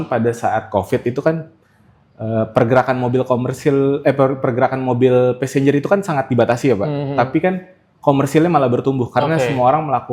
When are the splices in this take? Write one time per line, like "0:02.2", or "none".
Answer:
none